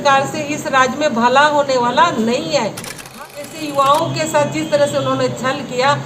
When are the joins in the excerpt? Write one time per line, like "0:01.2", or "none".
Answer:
0:03.1